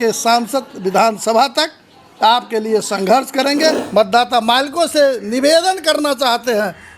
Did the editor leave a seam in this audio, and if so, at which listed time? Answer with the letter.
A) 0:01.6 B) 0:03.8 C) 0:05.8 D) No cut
B